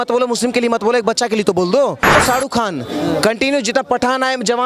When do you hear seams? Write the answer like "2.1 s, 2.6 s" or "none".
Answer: 2.2 s